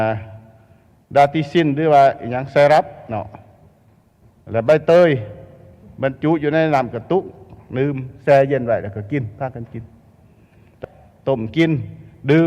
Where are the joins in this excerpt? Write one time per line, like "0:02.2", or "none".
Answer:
0:10.7